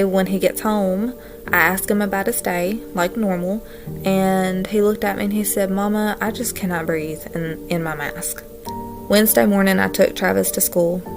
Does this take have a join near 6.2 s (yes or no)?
no